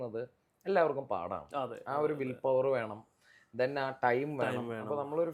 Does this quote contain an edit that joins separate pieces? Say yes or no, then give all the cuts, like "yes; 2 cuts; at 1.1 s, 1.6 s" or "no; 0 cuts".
no; 0 cuts